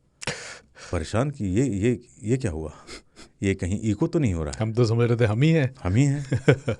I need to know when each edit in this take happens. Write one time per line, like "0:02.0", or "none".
none